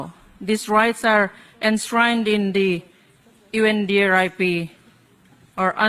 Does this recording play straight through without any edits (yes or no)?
yes